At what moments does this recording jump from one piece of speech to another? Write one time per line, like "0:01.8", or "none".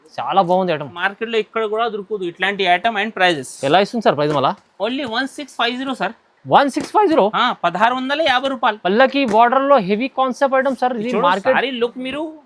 0:01.0